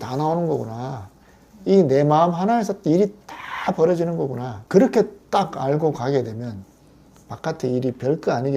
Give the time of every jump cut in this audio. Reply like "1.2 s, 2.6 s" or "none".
4.5 s